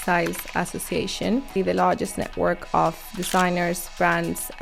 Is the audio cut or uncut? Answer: cut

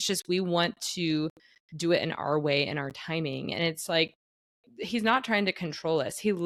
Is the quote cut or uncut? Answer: uncut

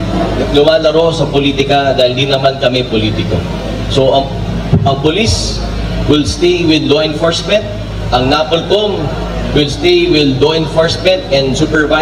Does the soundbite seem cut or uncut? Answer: uncut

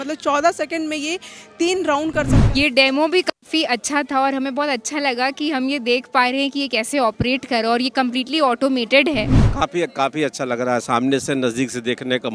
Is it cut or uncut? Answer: cut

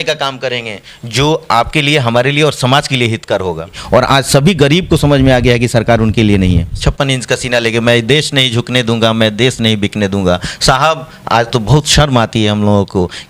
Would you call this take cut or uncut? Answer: cut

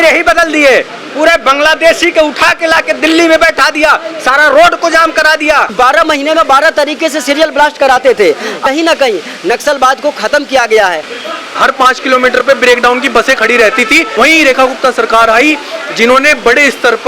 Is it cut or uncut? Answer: cut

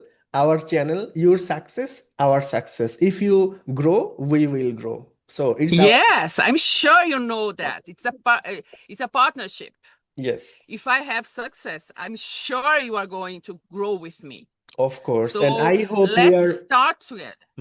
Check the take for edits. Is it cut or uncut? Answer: uncut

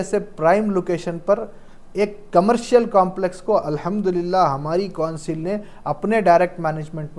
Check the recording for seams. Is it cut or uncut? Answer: uncut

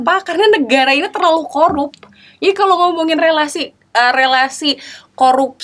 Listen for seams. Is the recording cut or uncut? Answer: uncut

